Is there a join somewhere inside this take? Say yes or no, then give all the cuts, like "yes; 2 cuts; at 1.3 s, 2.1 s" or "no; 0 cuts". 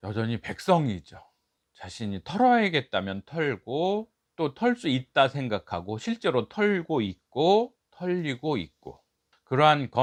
no; 0 cuts